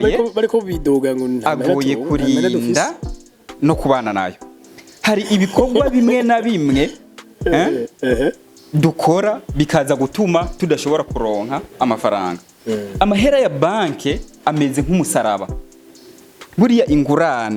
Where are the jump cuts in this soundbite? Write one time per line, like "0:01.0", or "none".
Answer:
none